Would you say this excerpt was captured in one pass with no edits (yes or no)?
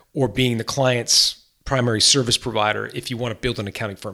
yes